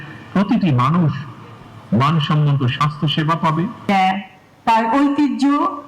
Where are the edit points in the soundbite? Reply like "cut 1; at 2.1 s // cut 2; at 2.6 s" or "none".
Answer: cut 1; at 3.8 s